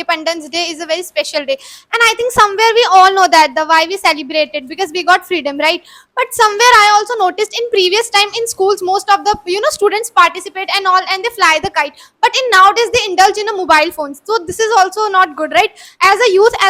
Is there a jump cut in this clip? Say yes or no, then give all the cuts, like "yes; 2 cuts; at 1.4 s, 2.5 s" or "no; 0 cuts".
no; 0 cuts